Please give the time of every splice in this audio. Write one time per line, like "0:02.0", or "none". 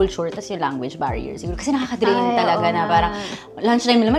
none